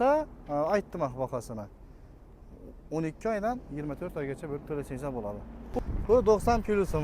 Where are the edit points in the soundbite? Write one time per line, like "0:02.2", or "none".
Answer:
0:05.8